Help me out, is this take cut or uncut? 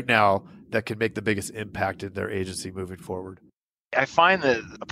cut